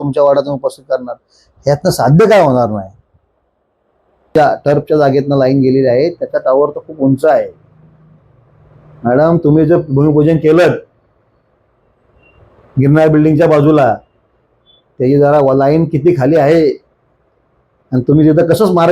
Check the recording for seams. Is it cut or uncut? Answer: cut